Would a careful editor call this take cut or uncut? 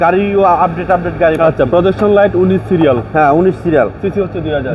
uncut